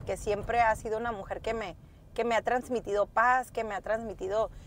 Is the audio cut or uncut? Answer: uncut